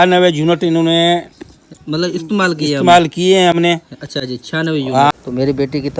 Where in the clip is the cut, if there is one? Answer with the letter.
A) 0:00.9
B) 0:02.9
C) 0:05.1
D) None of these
C